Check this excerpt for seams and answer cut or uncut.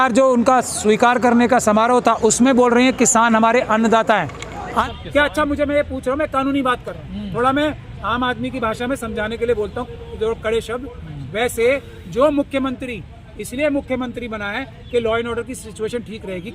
cut